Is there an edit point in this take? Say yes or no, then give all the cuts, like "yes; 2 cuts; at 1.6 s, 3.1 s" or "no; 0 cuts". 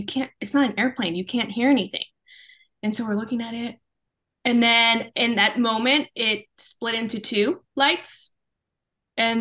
no; 0 cuts